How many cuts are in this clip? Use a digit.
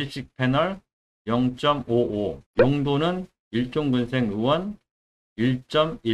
1